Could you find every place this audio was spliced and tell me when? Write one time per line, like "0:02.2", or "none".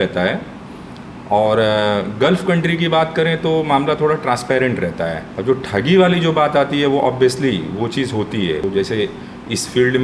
0:05.3
0:08.6